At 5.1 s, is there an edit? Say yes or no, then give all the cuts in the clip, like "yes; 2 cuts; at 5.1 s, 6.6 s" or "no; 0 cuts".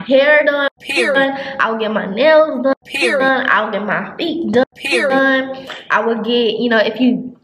no; 0 cuts